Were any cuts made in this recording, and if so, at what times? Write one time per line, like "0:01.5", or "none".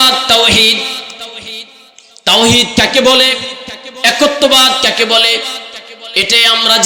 none